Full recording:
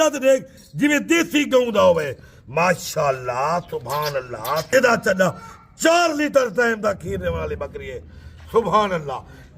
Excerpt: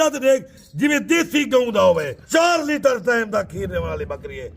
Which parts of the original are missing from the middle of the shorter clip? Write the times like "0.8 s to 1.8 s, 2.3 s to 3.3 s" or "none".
2.2 s to 5.7 s

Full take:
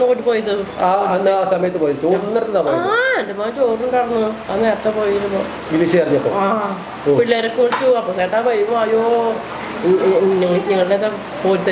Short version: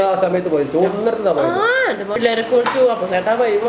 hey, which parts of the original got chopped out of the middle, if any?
3.5 s to 7.3 s

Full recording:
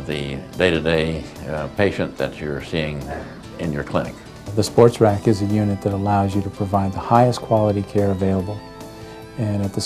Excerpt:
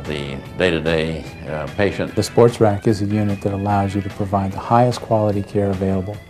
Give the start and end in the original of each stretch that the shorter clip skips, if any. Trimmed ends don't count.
2.1 s to 4.5 s

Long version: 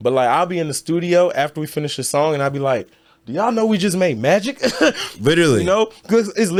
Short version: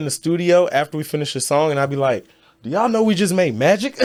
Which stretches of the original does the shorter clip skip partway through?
none

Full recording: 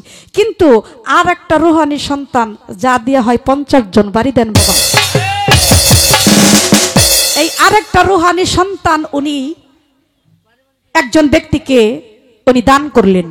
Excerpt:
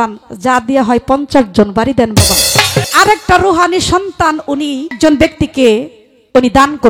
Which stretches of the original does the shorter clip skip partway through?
5.3 s to 7.5 s, 9.6 s to 11.1 s

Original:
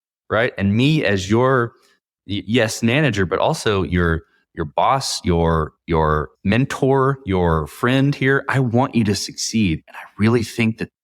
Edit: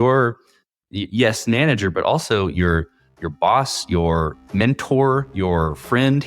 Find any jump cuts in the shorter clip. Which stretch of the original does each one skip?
5.8 s to 6.3 s

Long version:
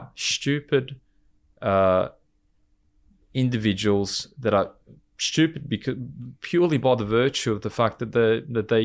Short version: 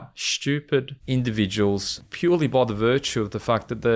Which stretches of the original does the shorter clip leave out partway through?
1.0 s to 3.2 s, 4.2 s to 6.3 s

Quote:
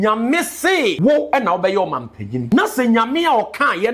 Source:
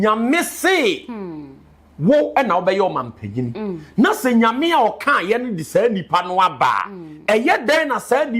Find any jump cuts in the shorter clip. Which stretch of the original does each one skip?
1.0 s to 2.0 s, 3.4 s to 3.8 s

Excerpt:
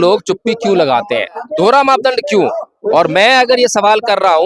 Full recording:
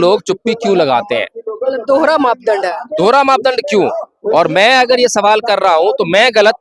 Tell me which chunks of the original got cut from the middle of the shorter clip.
1.4 s to 2.8 s

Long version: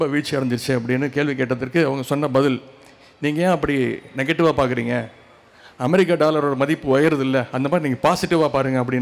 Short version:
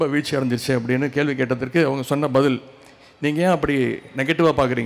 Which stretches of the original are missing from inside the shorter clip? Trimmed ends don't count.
none

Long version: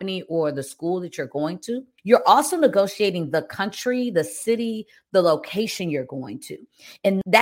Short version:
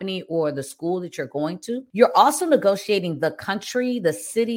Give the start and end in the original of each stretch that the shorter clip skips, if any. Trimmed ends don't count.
1.9 s to 2.0 s

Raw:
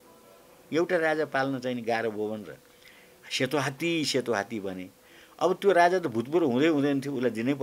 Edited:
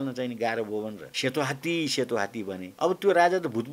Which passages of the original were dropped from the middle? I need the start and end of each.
2.5 s to 3.2 s, 4.8 s to 5.2 s

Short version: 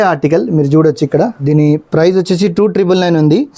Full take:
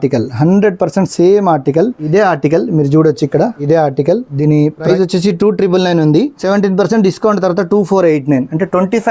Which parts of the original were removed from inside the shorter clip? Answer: 4.0 s to 4.7 s

